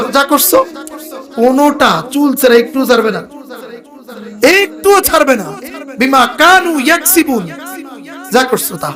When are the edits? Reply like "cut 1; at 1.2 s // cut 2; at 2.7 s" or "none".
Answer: none